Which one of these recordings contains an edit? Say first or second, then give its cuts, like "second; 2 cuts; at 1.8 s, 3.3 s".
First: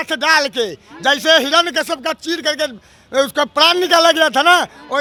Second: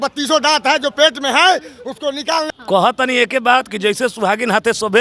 second; 1 cut; at 2.5 s